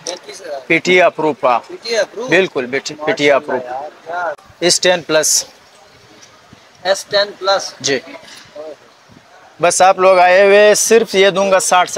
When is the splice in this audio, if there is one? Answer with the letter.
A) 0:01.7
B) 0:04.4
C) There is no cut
B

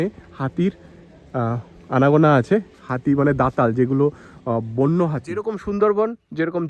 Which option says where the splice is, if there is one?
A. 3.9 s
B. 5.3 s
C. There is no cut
B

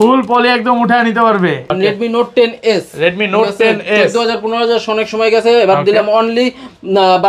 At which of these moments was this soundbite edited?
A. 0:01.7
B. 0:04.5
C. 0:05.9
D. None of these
A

